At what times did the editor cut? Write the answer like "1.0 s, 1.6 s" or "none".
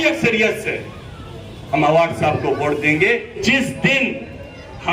3.4 s